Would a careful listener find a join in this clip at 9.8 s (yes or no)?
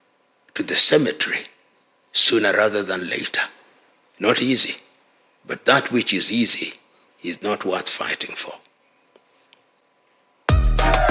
yes